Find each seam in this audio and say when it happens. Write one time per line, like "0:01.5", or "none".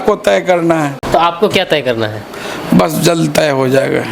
0:01.0